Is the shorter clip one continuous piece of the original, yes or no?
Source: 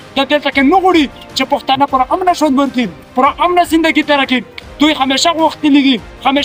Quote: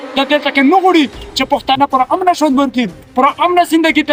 yes